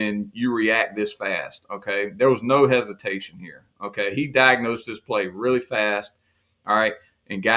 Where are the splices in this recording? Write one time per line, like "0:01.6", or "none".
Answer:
none